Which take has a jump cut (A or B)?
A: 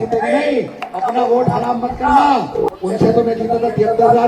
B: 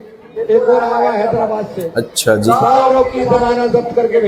A